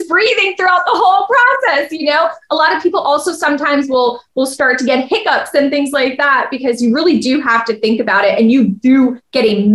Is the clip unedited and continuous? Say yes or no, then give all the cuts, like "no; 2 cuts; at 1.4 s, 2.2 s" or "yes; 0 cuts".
yes; 0 cuts